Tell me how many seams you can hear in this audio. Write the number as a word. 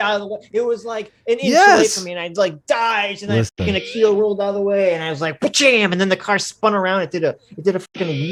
zero